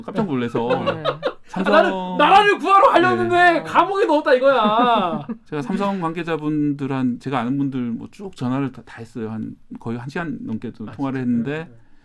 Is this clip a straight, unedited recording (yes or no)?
yes